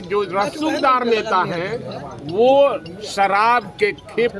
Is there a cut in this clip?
no; 0 cuts

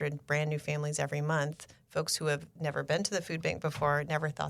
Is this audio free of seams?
yes; 0 cuts

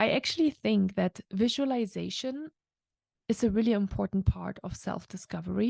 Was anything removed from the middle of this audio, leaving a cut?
no; 0 cuts

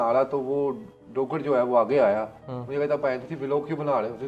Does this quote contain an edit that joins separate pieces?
no; 0 cuts

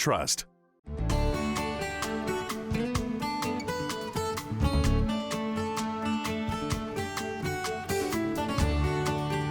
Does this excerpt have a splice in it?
yes; 1 cut; at 1.0 s

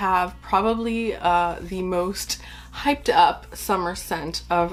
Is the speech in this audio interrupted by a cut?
no; 0 cuts

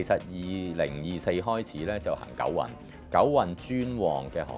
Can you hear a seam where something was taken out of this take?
no; 0 cuts

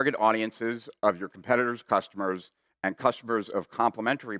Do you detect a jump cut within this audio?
no; 0 cuts

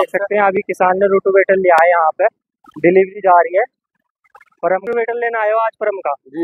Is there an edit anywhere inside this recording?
yes; 1 cut; at 4.8 s

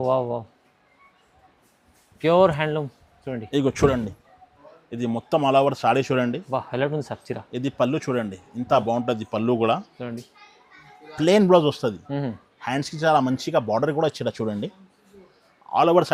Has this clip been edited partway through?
no; 0 cuts

